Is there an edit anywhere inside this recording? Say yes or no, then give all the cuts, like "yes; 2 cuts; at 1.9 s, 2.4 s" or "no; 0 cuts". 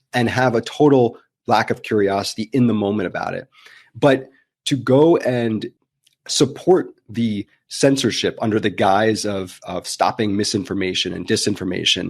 yes; 1 cut; at 5.8 s